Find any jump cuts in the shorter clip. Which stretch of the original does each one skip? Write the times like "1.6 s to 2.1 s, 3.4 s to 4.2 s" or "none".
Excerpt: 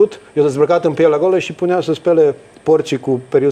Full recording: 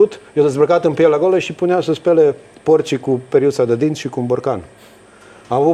none